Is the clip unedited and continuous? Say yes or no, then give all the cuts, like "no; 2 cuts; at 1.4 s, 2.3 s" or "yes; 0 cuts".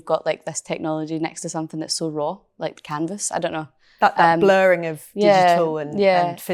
yes; 0 cuts